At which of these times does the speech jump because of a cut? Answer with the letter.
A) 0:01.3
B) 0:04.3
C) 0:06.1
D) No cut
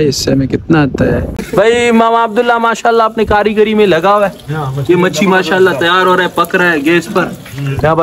A